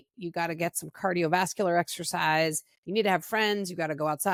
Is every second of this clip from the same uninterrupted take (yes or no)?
yes